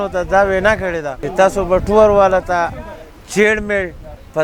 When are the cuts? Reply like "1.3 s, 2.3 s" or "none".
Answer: 1.1 s